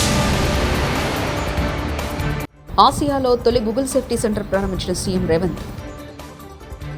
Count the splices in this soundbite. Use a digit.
0